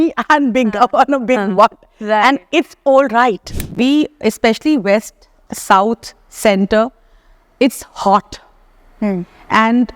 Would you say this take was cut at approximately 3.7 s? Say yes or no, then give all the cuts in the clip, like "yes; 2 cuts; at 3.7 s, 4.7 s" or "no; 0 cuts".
yes; 1 cut; at 3.7 s